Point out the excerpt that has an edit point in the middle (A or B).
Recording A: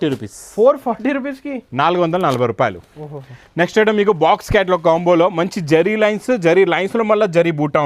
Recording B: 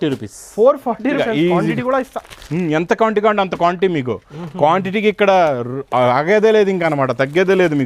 B